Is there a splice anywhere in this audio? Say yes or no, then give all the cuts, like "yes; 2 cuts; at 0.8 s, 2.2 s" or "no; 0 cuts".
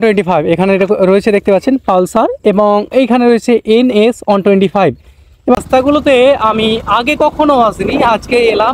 yes; 1 cut; at 5.6 s